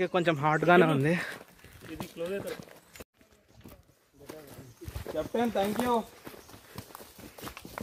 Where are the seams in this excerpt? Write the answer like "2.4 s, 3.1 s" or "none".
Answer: none